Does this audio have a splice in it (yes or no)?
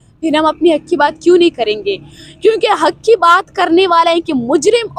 no